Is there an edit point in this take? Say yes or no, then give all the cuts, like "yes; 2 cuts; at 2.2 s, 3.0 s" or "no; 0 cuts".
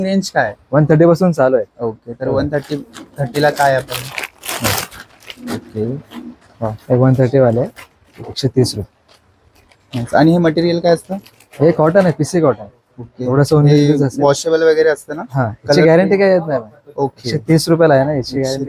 no; 0 cuts